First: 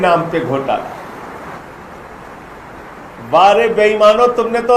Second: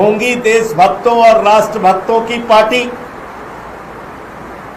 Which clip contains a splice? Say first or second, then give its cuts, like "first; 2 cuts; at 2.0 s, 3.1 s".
first; 1 cut; at 1.6 s